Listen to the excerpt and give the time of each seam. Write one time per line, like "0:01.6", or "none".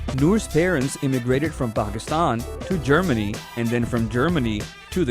0:03.0